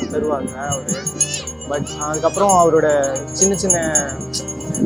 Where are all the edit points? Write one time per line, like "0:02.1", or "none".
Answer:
none